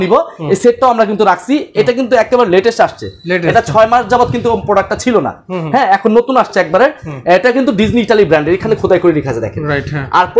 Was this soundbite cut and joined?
no; 0 cuts

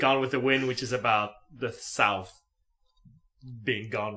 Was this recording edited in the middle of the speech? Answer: yes; 1 cut; at 3.1 s

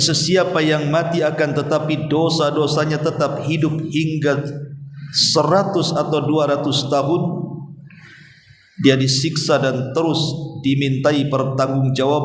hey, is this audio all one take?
yes; 0 cuts

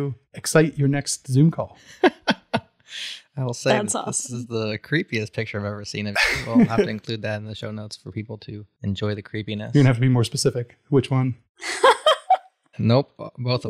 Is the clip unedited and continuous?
no; 1 cut; at 8.6 s

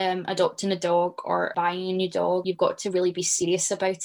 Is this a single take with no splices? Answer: no; 2 cuts; at 1.5 s, 2.4 s

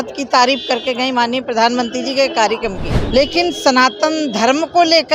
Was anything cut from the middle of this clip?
yes; 1 cut; at 2.9 s

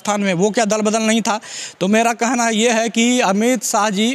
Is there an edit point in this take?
no; 0 cuts

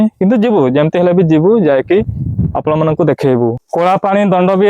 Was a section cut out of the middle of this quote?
yes; 1 cut; at 3.6 s

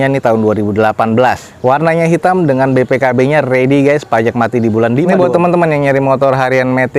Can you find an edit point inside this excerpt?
yes; 1 cut; at 5.1 s

